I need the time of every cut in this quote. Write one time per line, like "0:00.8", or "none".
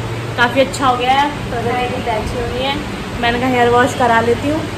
none

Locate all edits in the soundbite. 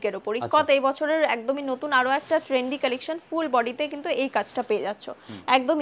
none

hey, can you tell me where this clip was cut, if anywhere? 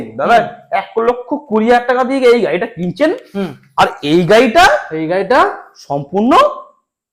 none

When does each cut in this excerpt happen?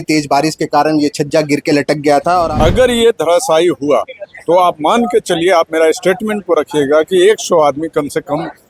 0:02.5

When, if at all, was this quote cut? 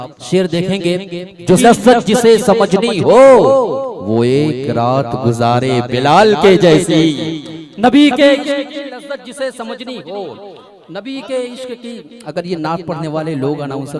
0:01.6

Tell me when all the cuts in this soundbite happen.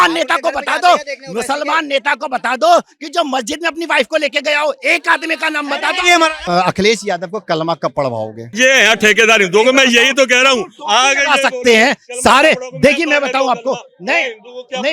0:06.4
0:08.4

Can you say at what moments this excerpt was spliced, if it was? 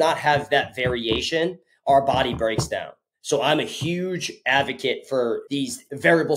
0:05.4

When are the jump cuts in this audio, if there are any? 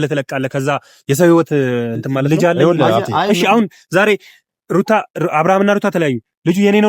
0:03.1

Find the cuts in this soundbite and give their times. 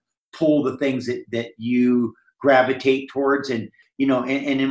0:03.8

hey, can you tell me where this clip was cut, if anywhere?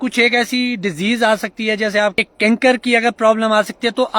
0:02.2

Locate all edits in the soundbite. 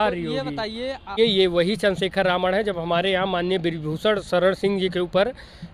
0:01.2

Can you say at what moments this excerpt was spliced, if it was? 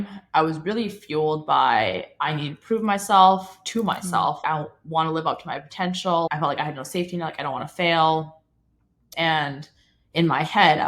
0:04.4
0:06.3
0:09.1

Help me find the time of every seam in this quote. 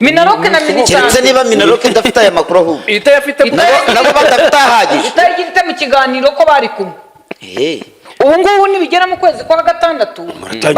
0:08.0

